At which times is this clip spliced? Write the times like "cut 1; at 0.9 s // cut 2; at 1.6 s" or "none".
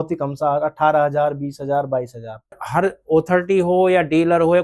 cut 1; at 2.6 s